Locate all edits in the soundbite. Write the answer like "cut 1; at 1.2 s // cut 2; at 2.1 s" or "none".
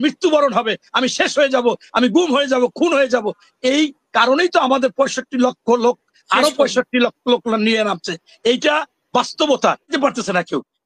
cut 1; at 9.9 s